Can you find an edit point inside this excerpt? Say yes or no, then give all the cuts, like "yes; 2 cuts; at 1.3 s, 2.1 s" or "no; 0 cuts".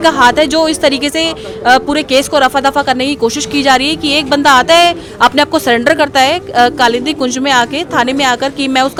no; 0 cuts